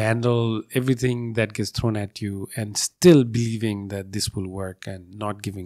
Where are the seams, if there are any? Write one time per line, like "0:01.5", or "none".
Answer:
none

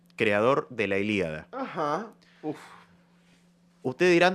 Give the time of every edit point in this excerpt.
none

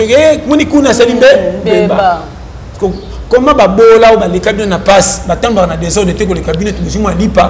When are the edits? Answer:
none

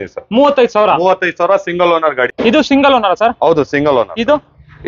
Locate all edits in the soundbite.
0:02.3

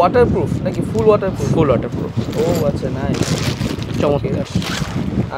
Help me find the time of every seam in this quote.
none

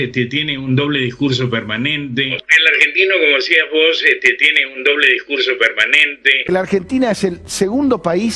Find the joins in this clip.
0:06.4

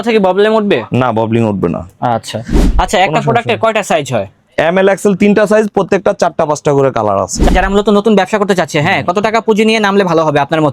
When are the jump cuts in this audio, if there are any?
0:02.5
0:07.4

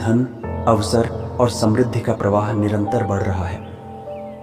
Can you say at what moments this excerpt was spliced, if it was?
0:03.5

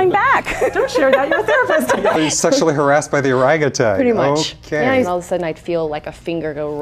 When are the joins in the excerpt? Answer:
0:02.2
0:05.1

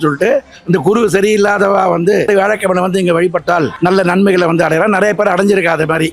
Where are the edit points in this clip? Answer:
0:02.3
0:03.7

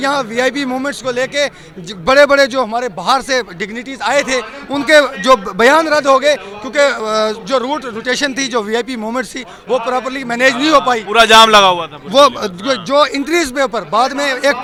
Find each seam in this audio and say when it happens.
none

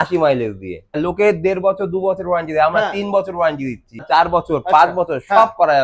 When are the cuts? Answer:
0:01.0
0:04.0

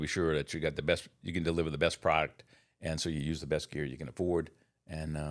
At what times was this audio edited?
none

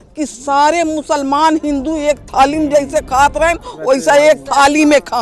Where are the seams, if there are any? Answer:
none

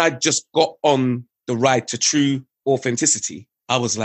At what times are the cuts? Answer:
0:01.3
0:02.5

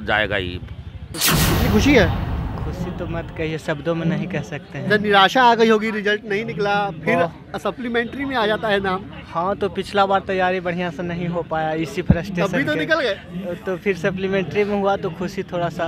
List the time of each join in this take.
0:01.2

